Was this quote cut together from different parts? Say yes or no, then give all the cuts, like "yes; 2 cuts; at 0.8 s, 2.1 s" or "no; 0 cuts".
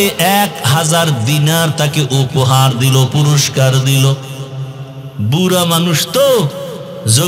no; 0 cuts